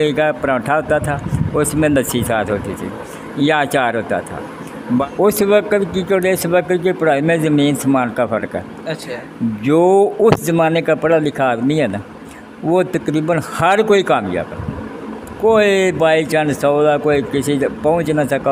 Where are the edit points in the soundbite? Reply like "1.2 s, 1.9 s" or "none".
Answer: 5.0 s